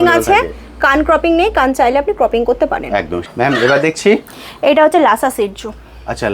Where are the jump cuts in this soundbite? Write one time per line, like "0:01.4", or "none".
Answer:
0:03.2